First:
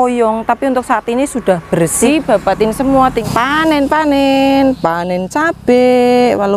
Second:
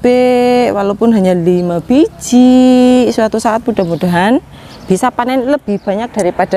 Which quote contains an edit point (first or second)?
first